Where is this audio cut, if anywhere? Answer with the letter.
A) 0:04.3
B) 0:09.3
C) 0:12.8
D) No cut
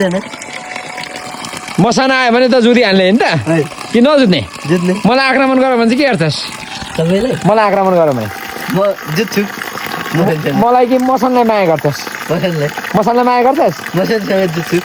D